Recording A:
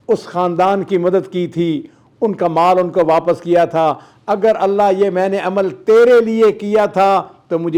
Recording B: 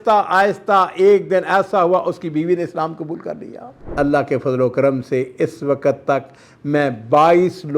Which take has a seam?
B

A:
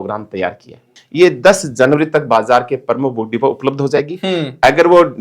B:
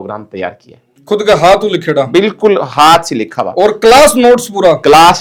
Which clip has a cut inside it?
A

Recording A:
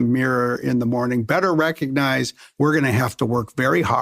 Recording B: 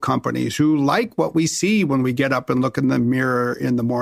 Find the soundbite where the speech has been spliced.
A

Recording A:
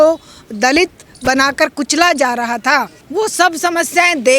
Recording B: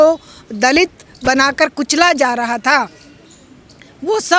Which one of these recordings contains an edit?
A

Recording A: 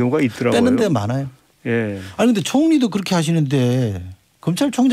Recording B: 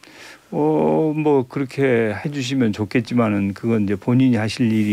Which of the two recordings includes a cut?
B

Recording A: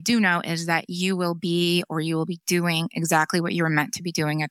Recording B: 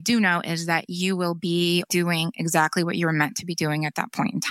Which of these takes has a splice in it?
B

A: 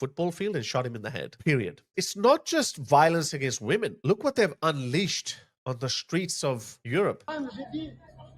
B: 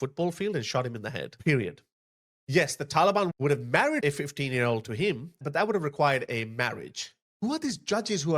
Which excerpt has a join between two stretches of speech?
A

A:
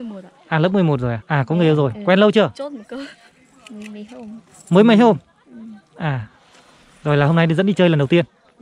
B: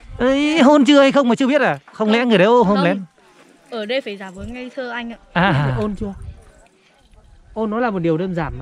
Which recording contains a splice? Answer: A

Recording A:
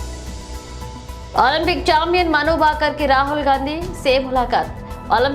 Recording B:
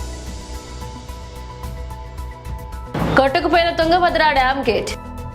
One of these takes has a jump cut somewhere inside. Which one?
A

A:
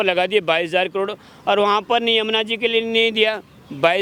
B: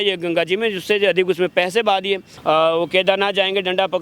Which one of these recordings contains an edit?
B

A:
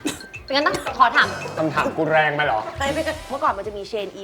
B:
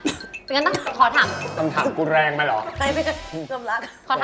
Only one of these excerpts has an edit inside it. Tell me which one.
A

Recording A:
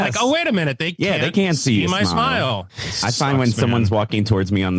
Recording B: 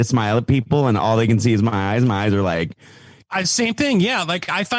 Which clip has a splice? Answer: B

